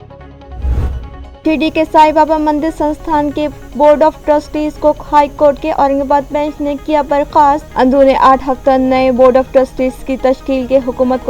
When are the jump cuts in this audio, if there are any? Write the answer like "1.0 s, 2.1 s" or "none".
1.2 s